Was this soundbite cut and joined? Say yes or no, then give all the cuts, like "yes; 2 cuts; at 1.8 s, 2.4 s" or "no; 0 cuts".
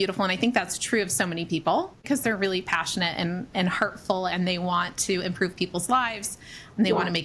yes; 1 cut; at 2.1 s